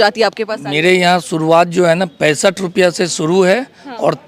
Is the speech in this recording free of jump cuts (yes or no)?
yes